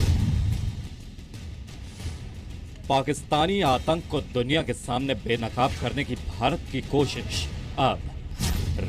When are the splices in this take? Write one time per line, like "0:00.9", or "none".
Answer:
0:06.1